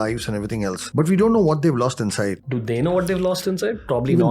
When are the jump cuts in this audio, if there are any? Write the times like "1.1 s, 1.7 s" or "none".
0.8 s, 2.5 s

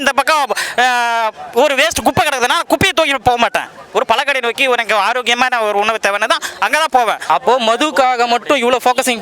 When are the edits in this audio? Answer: 7.2 s

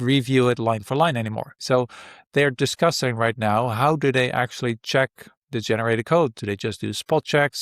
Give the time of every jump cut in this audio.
1.6 s

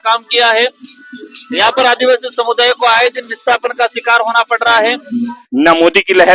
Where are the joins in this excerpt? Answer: 5.4 s

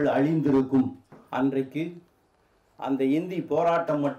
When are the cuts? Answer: 1.1 s

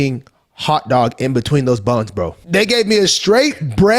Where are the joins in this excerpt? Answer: 2.5 s

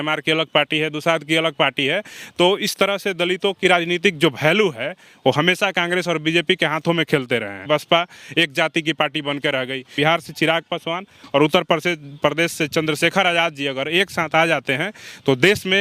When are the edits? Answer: 7.6 s, 9.9 s

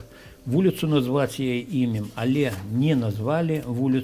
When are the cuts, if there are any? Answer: none

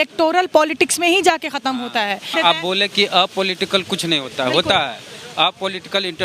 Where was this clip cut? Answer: 2.3 s

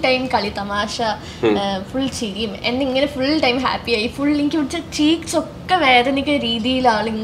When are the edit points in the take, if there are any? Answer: none

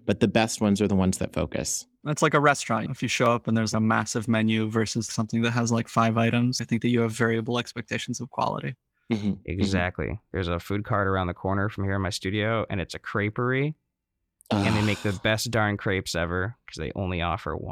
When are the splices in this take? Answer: 1.9 s

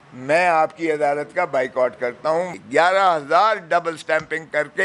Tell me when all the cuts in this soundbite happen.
2.5 s

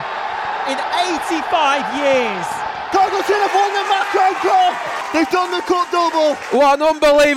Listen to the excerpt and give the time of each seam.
2.8 s, 5.0 s, 6.4 s

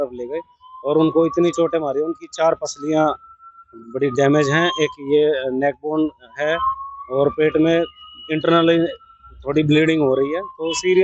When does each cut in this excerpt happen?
none

